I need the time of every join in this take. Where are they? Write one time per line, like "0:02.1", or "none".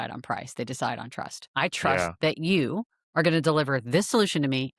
0:01.4